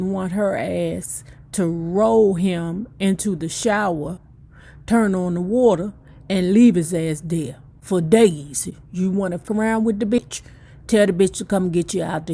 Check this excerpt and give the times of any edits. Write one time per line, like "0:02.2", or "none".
0:09.4
0:10.2